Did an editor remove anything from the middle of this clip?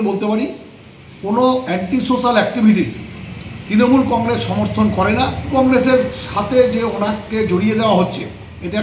yes; 1 cut; at 5.5 s

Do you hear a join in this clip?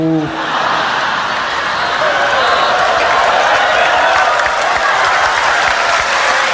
no; 0 cuts

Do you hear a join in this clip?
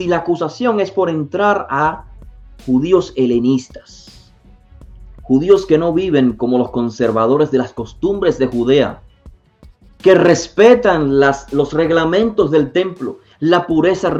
no; 0 cuts

